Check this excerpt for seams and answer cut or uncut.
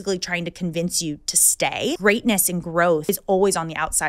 cut